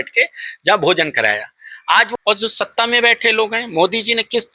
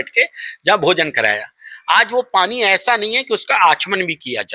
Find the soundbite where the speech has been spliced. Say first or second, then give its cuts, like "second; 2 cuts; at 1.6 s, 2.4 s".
first; 1 cut; at 2.1 s